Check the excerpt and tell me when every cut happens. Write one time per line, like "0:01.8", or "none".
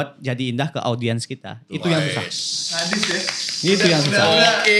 none